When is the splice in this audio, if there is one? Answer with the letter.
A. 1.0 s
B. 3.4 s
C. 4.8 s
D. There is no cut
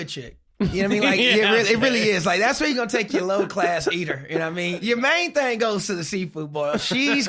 C